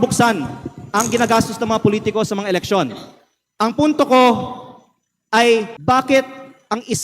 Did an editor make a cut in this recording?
yes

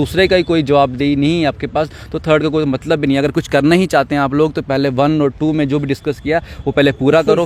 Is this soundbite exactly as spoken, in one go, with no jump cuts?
yes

